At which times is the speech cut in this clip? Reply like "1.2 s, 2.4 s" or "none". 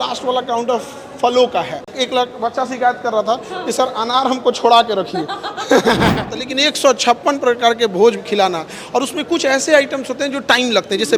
1.8 s, 6.4 s